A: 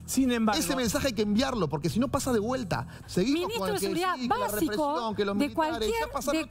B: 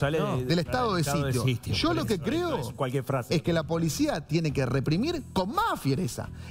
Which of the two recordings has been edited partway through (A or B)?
A